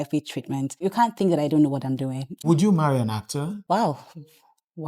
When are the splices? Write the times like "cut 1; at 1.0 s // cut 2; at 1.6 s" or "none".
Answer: cut 1; at 0.8 s // cut 2; at 2.4 s // cut 3; at 3.6 s